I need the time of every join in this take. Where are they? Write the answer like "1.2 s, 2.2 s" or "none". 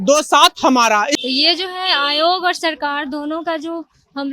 1.2 s